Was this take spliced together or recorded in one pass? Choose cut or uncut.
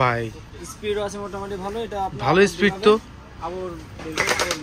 uncut